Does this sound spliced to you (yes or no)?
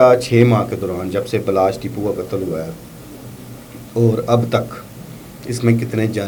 no